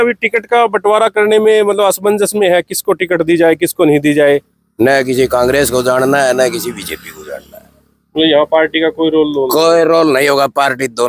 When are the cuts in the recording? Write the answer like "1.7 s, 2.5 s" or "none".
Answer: 4.6 s